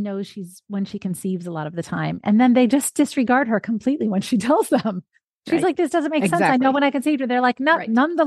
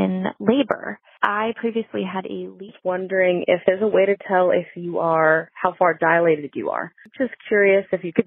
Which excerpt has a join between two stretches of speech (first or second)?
second